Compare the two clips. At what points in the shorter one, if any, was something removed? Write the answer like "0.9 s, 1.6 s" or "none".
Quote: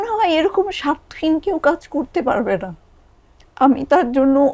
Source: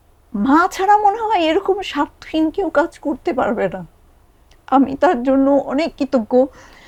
none

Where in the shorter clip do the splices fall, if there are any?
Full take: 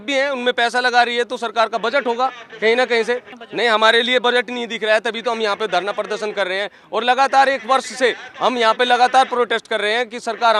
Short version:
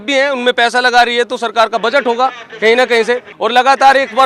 3.3 s

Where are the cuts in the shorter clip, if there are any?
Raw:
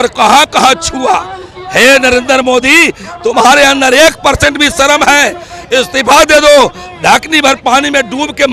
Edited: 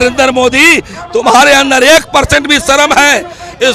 none

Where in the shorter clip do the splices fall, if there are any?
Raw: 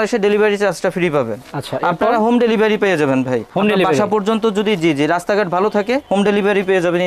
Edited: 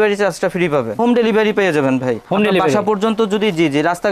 1.0 s

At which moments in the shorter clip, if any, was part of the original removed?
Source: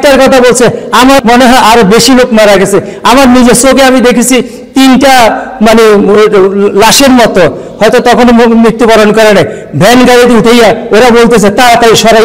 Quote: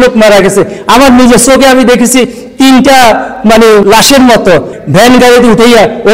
3.8 s, 4.8 s

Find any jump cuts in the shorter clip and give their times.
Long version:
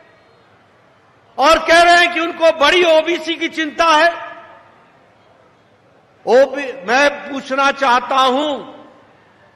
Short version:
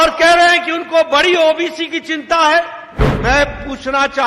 3.1 s

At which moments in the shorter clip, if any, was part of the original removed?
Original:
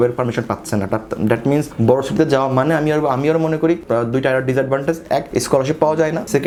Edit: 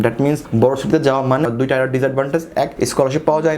1.5 s

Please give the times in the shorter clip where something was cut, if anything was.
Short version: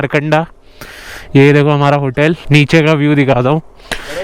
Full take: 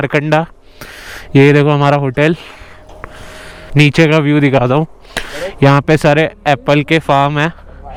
2.4 s

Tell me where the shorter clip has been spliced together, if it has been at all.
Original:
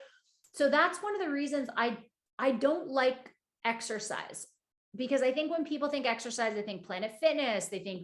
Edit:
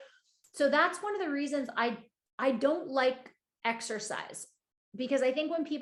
none

